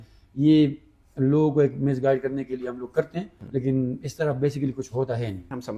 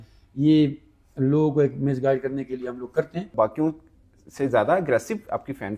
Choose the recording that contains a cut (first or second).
second